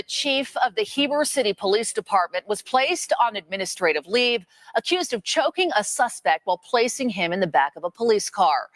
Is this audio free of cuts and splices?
yes; 0 cuts

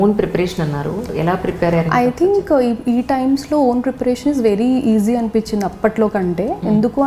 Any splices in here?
yes; 1 cut; at 1.1 s

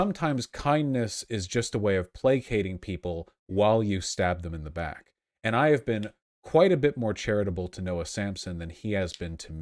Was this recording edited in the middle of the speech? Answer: no; 0 cuts

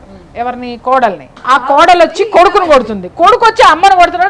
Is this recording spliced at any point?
yes; 1 cut; at 1.3 s

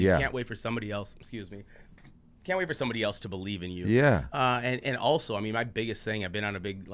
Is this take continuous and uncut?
yes; 0 cuts

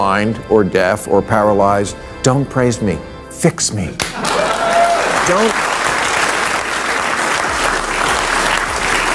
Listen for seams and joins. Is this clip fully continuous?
yes; 0 cuts

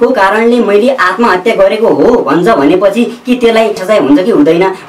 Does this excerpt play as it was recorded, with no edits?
no; 1 cut; at 3.8 s

